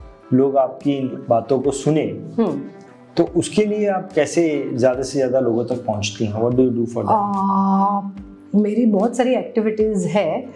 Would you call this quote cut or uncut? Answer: uncut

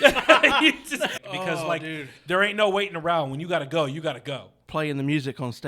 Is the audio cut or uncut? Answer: cut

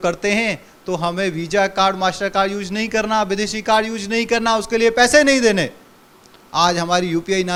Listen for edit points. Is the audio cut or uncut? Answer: uncut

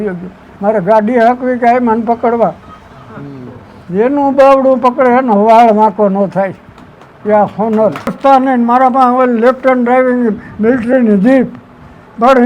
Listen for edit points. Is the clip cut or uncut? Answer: cut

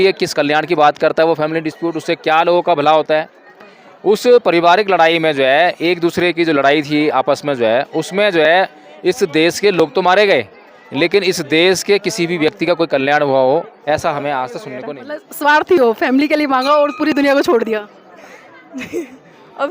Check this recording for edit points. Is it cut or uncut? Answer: cut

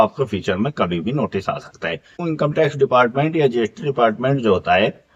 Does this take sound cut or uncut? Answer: cut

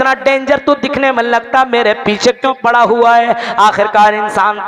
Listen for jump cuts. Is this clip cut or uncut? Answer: uncut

